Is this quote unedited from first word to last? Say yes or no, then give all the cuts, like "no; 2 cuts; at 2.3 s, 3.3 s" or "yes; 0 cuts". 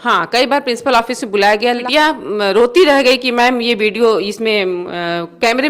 no; 1 cut; at 1.8 s